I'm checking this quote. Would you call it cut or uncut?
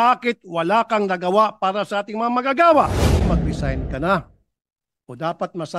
cut